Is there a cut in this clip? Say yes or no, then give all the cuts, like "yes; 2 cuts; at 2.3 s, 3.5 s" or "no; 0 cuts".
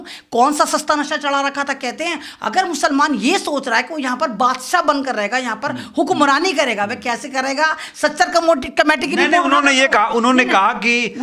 no; 0 cuts